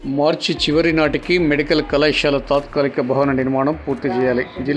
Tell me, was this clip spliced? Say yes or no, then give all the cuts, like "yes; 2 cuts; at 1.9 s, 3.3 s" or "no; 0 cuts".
no; 0 cuts